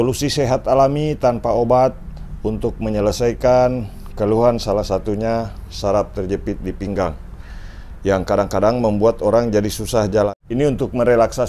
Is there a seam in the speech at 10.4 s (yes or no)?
yes